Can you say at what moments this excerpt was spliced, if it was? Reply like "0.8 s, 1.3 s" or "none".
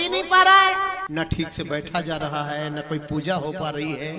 1.0 s